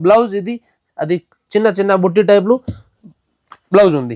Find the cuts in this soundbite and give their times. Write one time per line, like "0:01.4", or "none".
none